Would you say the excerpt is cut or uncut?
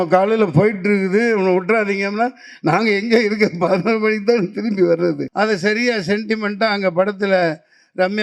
cut